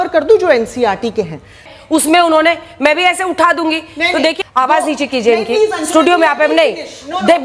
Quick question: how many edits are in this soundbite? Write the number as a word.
two